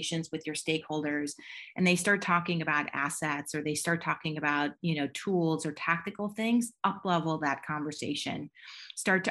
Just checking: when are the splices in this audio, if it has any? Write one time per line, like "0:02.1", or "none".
none